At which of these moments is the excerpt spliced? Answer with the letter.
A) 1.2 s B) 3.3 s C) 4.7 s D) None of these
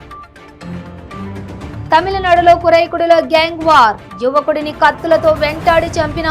A